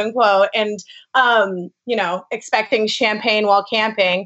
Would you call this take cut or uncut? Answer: uncut